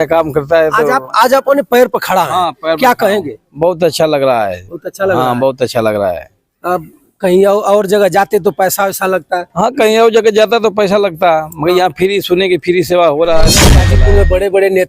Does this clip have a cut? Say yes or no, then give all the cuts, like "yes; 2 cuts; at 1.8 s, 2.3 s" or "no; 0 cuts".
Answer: yes; 1 cut; at 13.8 s